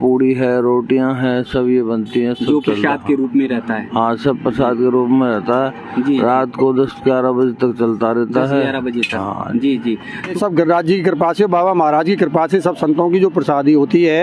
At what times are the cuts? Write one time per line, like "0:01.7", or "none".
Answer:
0:10.4